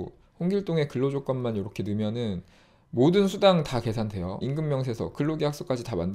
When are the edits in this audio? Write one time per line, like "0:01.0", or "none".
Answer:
0:04.4